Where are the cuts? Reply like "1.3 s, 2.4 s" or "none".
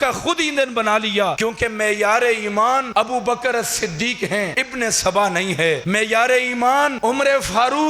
1.4 s, 2.9 s, 4.6 s, 5.8 s, 7.0 s